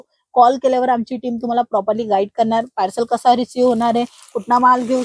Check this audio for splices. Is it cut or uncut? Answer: uncut